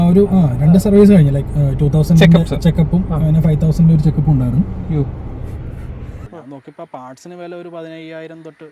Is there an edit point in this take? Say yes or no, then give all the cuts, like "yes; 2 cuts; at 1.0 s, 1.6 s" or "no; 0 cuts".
yes; 1 cut; at 6.3 s